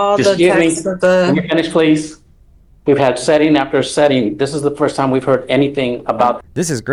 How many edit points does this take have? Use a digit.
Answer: 0